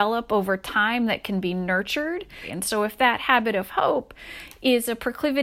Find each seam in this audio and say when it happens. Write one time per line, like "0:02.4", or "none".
0:02.5